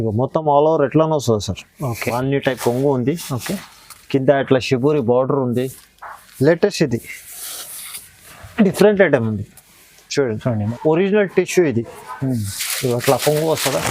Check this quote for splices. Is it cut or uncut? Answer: cut